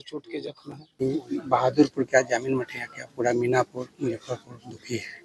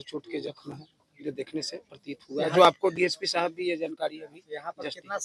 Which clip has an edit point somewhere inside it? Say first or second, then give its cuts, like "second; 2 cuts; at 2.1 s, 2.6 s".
first; 1 cut; at 1.1 s